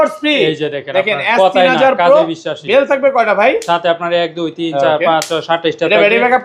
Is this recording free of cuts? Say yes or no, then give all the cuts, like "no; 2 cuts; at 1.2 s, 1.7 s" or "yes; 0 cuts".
yes; 0 cuts